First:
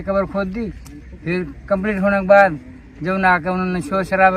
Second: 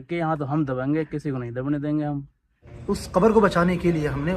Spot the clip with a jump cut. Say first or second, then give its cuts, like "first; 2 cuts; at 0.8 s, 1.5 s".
second; 1 cut; at 2.7 s